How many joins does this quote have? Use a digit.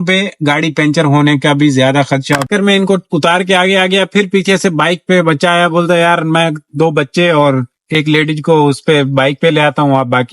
1